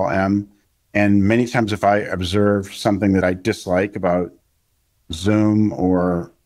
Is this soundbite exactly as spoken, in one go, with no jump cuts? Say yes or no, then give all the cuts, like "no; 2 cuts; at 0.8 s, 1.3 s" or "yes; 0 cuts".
no; 1 cut; at 3.2 s